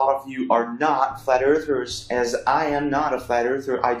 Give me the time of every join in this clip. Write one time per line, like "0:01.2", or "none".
none